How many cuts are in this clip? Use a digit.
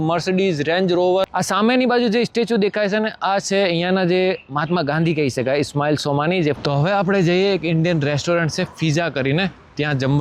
2